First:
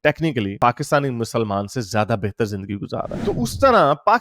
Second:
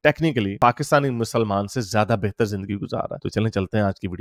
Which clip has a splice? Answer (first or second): first